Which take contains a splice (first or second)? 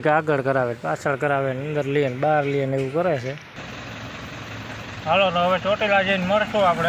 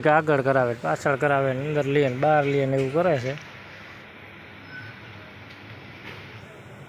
first